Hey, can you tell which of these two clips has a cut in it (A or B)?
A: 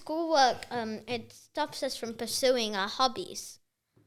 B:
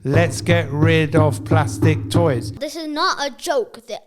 B